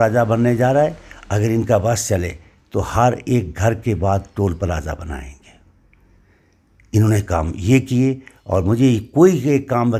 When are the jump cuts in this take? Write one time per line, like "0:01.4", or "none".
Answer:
none